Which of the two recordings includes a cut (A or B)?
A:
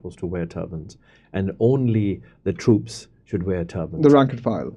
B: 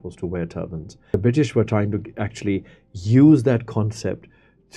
B